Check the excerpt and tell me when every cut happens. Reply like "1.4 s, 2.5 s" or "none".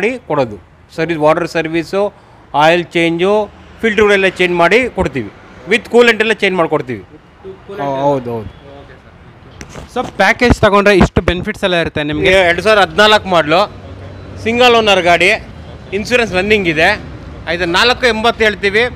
12.4 s

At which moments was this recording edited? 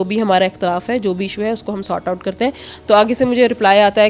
none

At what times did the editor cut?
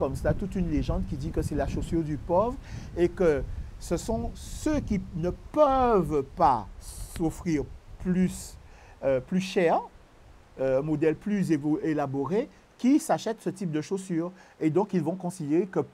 none

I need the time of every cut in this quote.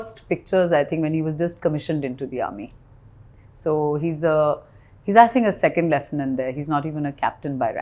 none

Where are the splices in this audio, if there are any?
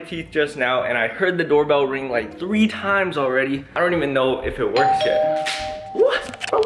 3.7 s

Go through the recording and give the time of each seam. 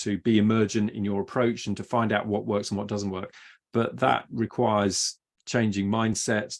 none

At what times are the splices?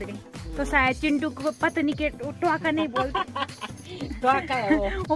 none

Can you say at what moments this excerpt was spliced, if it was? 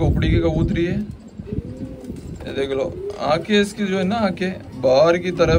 none

